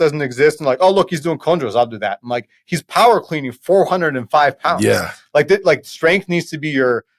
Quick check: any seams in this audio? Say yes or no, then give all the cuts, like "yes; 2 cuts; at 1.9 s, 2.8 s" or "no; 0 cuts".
no; 0 cuts